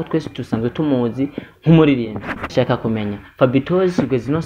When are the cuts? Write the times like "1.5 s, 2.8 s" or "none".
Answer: 2.5 s